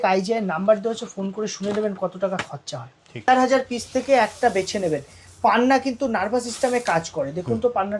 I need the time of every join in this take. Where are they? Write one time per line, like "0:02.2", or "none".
0:03.3